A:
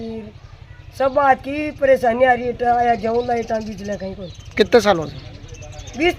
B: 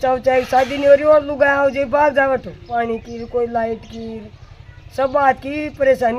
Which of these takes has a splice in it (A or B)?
B